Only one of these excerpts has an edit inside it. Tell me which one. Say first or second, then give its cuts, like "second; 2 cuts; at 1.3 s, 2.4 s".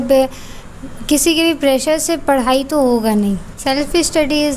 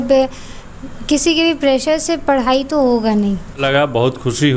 second; 1 cut; at 3.6 s